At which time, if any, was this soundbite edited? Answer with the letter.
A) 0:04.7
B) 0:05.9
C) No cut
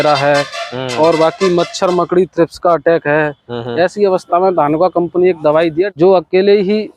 B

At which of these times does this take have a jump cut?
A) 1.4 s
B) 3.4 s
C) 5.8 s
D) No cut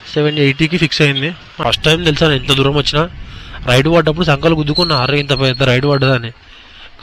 A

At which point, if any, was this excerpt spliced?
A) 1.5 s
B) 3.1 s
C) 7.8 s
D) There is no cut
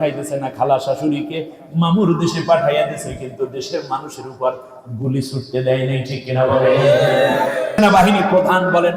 C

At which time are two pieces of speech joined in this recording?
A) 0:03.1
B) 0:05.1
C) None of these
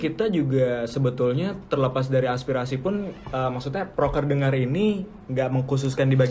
C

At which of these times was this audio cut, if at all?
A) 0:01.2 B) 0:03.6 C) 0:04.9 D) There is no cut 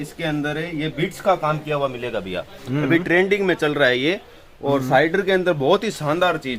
D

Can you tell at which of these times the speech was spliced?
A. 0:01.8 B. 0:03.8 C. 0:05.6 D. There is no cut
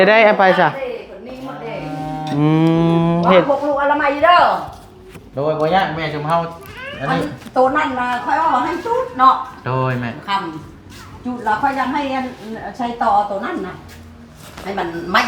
D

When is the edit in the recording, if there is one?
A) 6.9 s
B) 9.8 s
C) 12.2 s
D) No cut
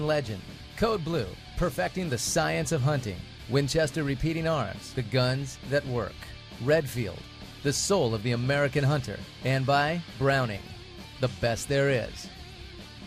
C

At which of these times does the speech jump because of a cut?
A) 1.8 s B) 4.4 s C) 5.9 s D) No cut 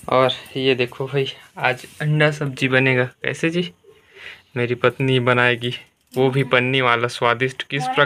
D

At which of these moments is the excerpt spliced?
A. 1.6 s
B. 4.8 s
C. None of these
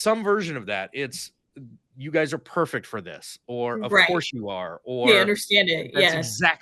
C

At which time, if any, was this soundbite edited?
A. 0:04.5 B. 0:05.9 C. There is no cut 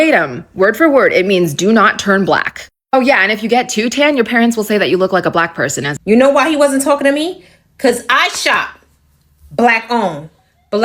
B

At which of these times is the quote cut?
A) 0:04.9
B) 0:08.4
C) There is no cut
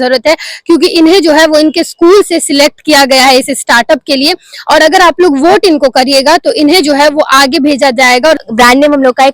B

